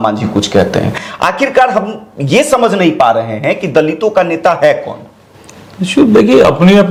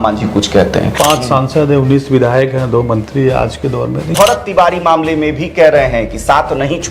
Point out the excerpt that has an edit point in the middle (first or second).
second